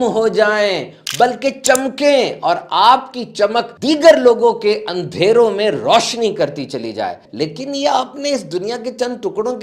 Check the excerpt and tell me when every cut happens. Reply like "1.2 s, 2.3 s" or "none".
3.7 s, 7.3 s